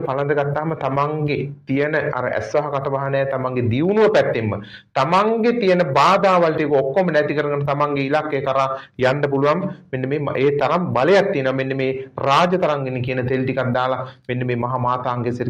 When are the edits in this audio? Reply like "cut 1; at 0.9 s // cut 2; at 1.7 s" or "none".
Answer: none

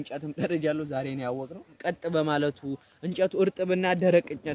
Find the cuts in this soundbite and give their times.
cut 1; at 1.7 s

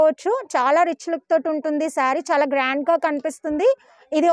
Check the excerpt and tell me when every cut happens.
none

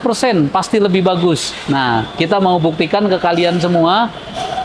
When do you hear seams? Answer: none

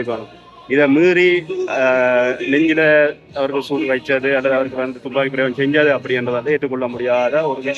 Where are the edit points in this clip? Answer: none

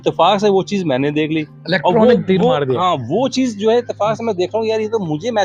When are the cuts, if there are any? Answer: none

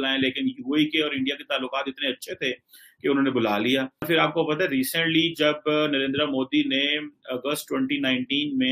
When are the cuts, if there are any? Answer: cut 1; at 4.1 s

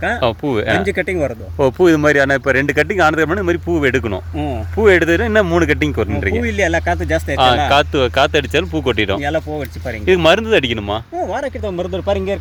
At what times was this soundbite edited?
none

